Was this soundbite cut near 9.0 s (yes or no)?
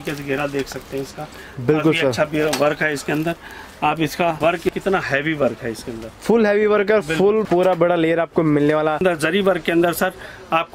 yes